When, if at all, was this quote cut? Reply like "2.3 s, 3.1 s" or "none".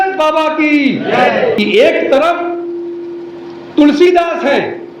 1.6 s